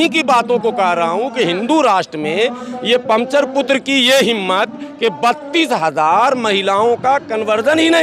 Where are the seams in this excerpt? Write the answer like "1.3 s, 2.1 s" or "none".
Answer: none